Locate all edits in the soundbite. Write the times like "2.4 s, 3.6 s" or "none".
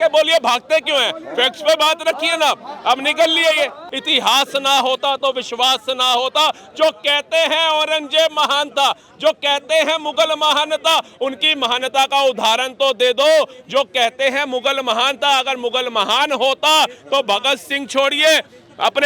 3.9 s